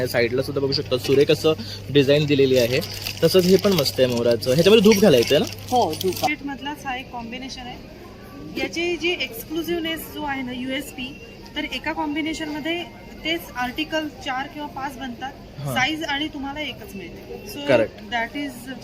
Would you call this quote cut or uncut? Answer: cut